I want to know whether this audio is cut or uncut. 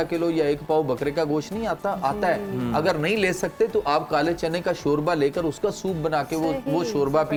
uncut